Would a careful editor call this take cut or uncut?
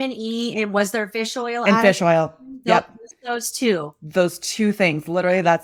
uncut